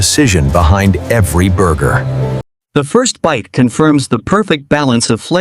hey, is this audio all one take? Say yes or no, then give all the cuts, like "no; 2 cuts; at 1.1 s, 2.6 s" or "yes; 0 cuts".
no; 1 cut; at 2.5 s